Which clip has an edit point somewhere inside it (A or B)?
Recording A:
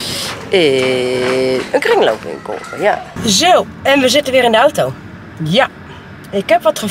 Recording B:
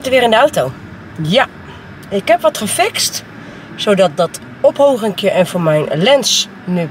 A